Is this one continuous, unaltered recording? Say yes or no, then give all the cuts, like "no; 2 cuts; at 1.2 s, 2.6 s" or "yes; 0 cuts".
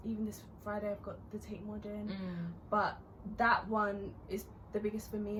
yes; 0 cuts